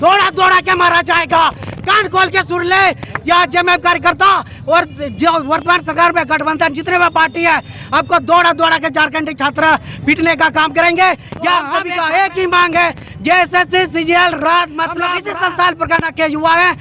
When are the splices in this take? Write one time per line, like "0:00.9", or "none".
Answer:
0:11.8
0:15.2

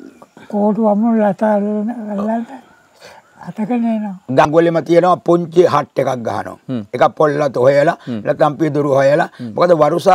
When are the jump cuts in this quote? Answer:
0:04.5

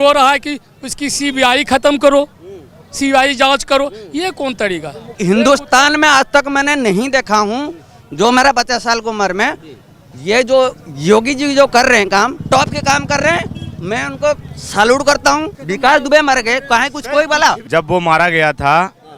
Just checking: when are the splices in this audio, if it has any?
0:05.1
0:12.4
0:15.6
0:17.6

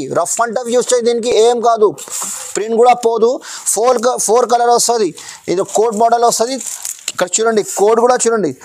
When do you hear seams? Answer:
none

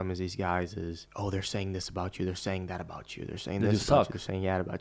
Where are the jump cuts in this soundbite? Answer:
0:01.1

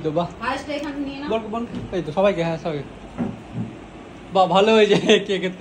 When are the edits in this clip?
none

